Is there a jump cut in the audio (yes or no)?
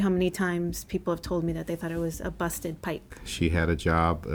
yes